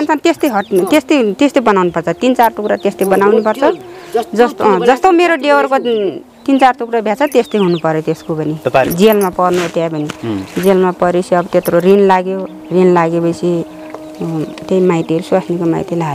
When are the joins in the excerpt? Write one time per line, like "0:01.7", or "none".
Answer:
0:08.9